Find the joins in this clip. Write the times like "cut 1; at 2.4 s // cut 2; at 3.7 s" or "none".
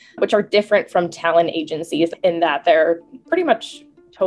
cut 1; at 2.1 s